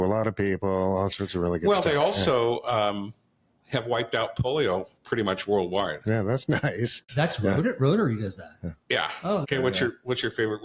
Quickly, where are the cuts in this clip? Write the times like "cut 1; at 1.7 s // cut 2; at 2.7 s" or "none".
cut 1; at 7.1 s // cut 2; at 9.4 s